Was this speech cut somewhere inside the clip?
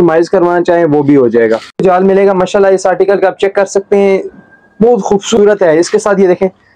yes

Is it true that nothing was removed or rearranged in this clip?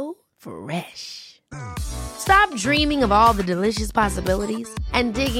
yes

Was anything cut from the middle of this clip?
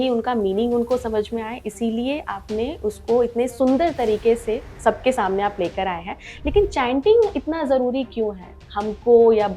yes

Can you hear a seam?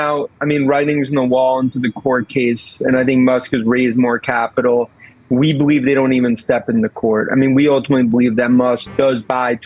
no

